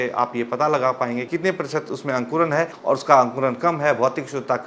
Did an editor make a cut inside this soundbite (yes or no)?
yes